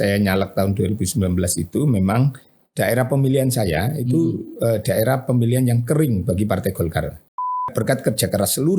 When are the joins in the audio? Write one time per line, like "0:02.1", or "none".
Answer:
0:07.7